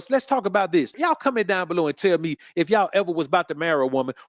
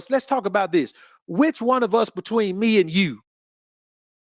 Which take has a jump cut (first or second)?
first